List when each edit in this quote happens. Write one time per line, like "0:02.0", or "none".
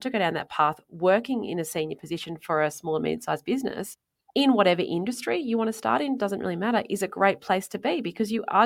none